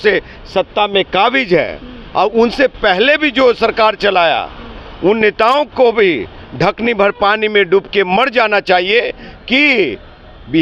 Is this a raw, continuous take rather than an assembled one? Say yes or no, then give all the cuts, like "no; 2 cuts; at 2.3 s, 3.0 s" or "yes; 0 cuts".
yes; 0 cuts